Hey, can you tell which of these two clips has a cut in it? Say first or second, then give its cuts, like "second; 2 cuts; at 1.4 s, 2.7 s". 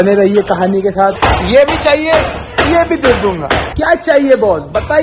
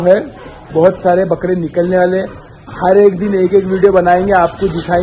first; 2 cuts; at 1.2 s, 3.7 s